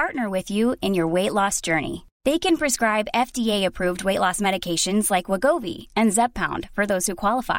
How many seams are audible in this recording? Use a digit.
0